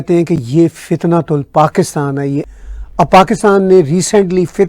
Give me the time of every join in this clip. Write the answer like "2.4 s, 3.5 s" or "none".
2.5 s

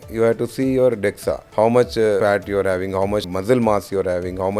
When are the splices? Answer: 1.4 s, 2.2 s, 3.3 s

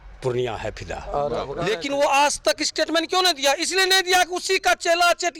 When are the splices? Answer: 1.5 s

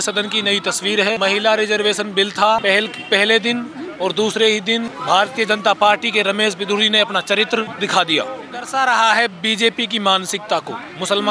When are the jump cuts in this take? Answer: 1.2 s, 2.6 s, 4.9 s, 7.7 s, 8.7 s

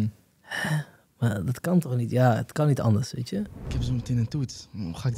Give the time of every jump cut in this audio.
3.7 s

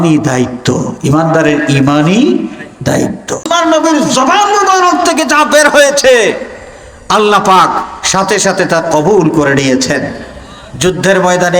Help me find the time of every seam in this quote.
3.5 s

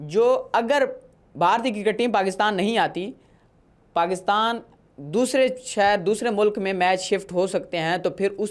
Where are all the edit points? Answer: none

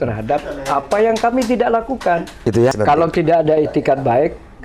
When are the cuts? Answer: 2.7 s

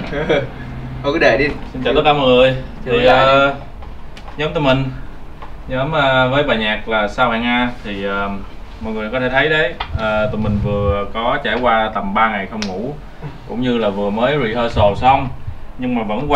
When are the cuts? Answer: none

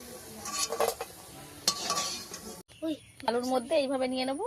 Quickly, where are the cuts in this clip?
2.7 s

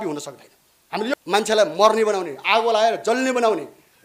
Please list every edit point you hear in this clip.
1.0 s

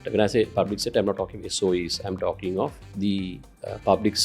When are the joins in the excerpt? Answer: 2.8 s

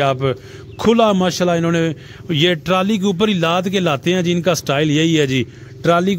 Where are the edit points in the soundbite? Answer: none

